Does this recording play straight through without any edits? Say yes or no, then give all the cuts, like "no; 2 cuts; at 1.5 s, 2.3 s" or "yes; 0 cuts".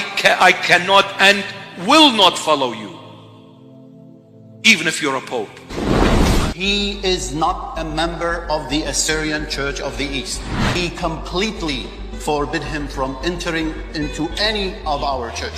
yes; 0 cuts